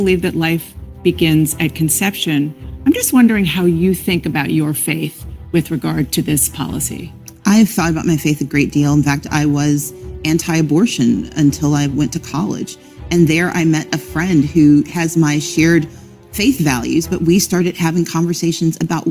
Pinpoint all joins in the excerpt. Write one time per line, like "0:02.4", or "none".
none

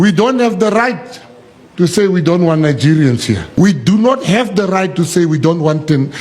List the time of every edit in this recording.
0:03.5

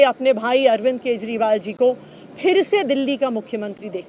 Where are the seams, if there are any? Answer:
none

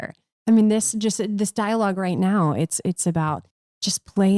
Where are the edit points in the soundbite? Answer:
none

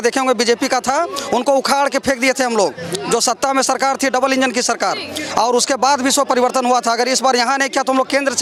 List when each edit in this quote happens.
none

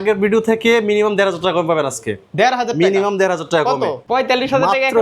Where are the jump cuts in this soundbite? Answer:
0:04.0

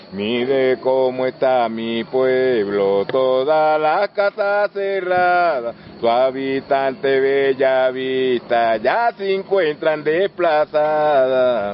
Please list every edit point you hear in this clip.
none

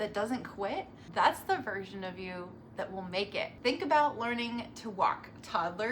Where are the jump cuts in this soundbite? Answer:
0:01.0
0:03.5

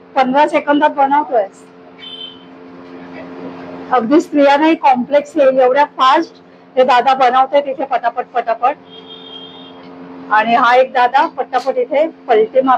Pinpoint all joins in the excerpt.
none

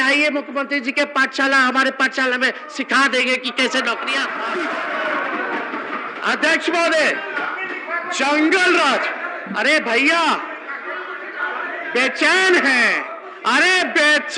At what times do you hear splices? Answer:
0:04.4

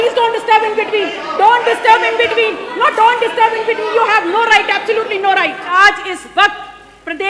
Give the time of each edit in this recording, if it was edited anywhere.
0:05.7

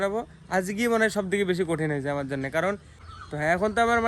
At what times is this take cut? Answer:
0:02.9

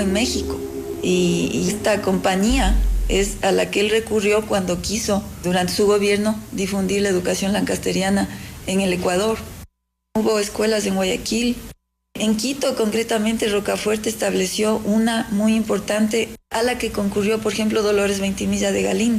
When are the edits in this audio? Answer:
0:09.8

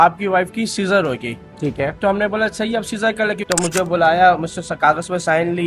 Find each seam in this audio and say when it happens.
0:03.5

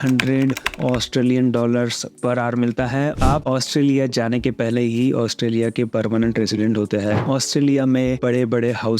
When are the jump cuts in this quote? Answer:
0:03.2
0:07.2

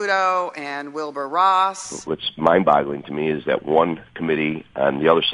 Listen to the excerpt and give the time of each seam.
0:01.8

